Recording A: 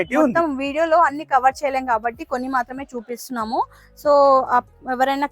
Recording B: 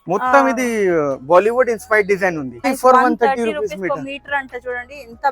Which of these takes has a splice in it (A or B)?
B